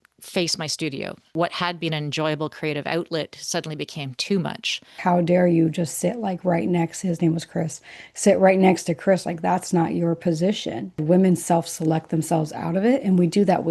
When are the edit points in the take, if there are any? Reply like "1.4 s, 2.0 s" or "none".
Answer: 5.0 s, 11.0 s